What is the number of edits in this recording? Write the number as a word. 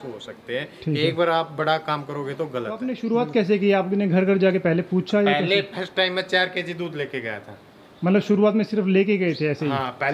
one